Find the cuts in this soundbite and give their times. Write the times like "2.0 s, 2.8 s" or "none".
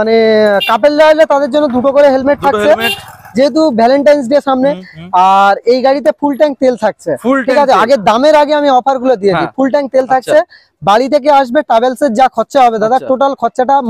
none